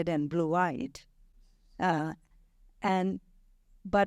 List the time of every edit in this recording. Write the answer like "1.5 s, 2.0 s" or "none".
none